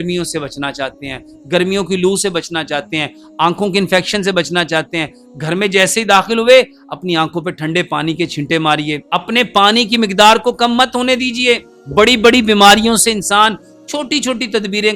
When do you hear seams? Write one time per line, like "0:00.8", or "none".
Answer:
0:09.0
0:11.8